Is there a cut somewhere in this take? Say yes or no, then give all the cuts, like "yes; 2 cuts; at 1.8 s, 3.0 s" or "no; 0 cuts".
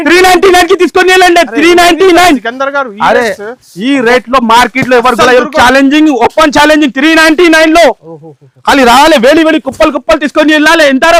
no; 0 cuts